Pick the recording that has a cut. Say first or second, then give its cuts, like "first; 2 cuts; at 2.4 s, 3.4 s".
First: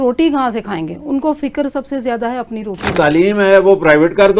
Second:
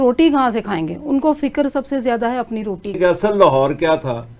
first; 1 cut; at 2.9 s